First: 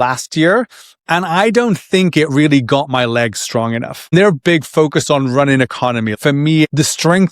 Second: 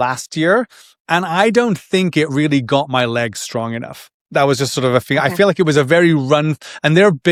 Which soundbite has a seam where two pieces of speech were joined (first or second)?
first